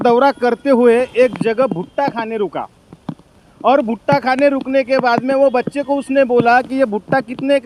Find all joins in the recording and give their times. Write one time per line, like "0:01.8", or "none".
none